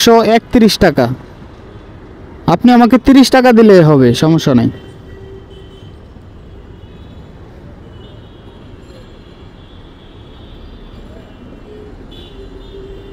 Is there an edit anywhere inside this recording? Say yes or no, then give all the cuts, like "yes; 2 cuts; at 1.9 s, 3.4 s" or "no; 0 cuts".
no; 0 cuts